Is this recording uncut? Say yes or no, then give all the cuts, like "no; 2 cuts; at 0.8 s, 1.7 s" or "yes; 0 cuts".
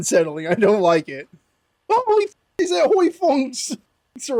yes; 0 cuts